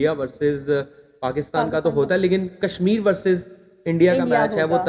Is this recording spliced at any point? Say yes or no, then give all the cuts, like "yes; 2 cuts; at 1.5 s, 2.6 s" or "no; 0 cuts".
no; 0 cuts